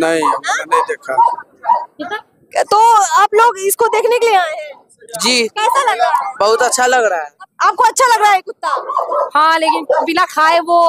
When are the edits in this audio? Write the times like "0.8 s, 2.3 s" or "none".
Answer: 7.3 s